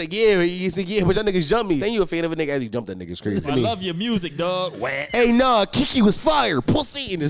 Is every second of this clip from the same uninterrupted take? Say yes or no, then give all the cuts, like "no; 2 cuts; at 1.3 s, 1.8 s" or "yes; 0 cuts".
no; 3 cuts; at 1.8 s, 3.5 s, 5.0 s